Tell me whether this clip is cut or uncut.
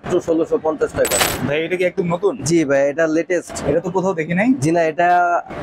cut